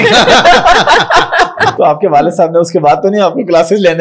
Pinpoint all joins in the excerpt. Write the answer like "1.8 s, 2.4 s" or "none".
1.7 s